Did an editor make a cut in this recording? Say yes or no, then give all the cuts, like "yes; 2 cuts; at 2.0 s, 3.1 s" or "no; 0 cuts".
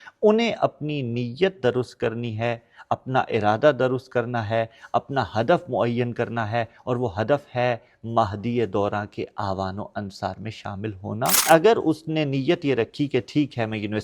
yes; 1 cut; at 11.4 s